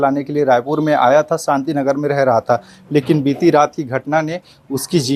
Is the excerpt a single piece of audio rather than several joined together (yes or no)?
yes